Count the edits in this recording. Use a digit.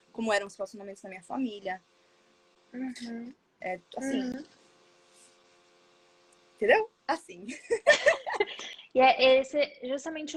0